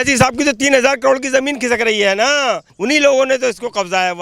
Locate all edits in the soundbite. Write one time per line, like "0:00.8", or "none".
0:02.7